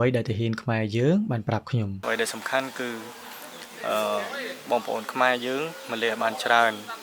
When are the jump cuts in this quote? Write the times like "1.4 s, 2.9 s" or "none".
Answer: 2.0 s